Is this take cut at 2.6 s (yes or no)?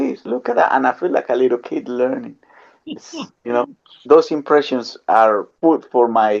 no